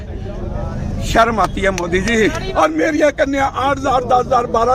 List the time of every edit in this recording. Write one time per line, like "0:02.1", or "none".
0:02.4